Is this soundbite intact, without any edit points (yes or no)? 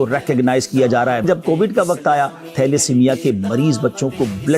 no